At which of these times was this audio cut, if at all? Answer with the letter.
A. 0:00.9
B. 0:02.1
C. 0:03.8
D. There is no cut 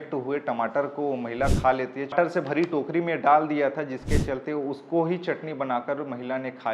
B